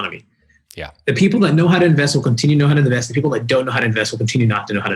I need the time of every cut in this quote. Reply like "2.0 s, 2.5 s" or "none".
none

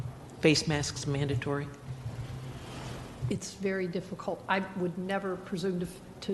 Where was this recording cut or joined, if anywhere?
3.0 s

